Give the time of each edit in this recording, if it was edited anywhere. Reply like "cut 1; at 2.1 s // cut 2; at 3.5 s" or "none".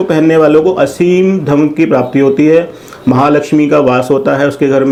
none